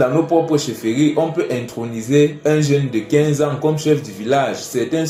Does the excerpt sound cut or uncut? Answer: uncut